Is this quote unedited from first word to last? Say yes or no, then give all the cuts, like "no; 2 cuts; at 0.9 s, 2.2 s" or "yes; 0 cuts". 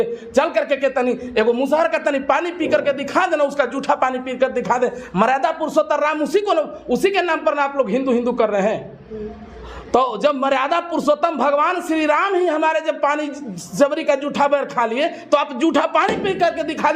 yes; 0 cuts